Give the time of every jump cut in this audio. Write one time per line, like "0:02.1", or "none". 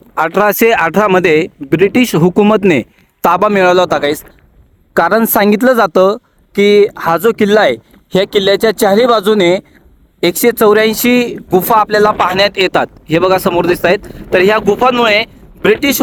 none